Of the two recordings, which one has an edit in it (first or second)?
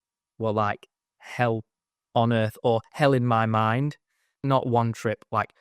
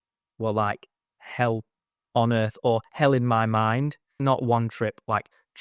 second